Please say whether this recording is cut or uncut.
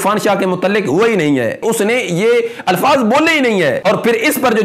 cut